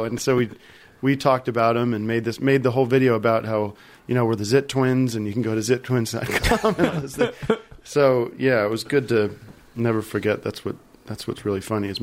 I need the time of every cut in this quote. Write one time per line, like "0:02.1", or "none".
0:07.7